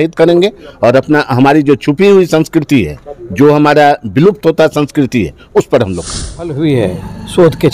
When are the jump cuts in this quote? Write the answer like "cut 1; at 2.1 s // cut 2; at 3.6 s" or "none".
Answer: cut 1; at 6.5 s